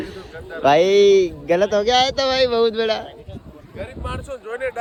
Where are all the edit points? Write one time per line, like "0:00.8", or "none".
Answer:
none